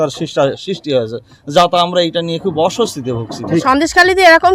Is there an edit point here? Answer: yes; 1 cut; at 3.6 s

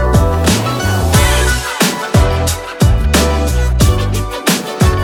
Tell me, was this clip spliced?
no; 0 cuts

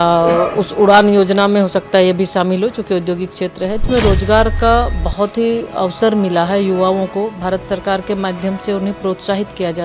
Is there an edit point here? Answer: yes; 1 cut; at 3.8 s

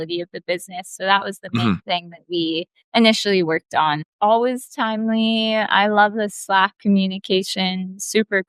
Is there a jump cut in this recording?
yes; 2 cuts; at 2.7 s, 4.1 s

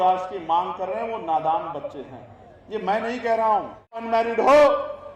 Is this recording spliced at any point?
yes; 1 cut; at 3.9 s

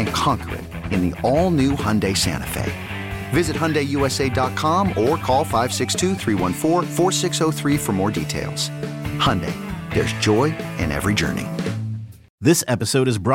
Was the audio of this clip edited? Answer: yes; 1 cut; at 12.3 s

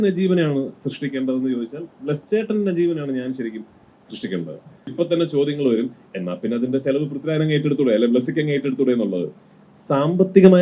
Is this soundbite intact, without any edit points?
no; 1 cut; at 4.9 s

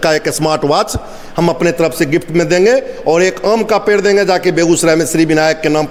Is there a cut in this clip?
no; 0 cuts

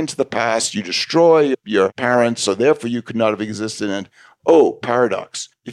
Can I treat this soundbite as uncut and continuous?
yes; 0 cuts

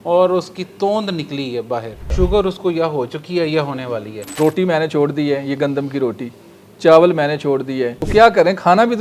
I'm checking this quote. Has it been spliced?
yes; 3 cuts; at 2.0 s, 4.2 s, 8.0 s

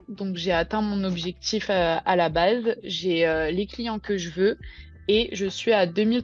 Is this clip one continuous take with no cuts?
yes; 0 cuts

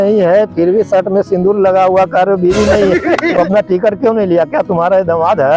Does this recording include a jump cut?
yes; 1 cut; at 3.2 s

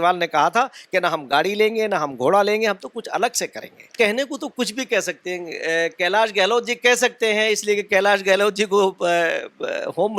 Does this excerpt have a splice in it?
yes; 1 cut; at 3.9 s

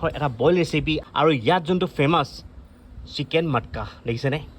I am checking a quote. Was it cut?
yes; 1 cut; at 1.0 s

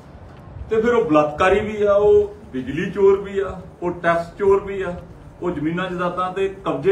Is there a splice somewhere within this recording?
no; 0 cuts

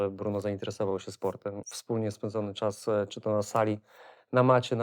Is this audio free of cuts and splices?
no; 1 cut; at 1.7 s

